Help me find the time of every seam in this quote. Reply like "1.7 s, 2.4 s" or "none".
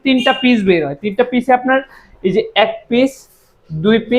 none

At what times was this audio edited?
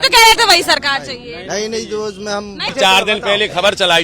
2.7 s

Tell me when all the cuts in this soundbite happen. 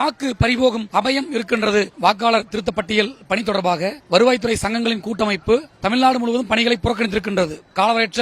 1.9 s

